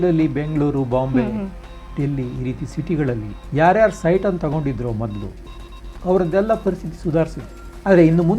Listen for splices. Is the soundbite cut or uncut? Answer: cut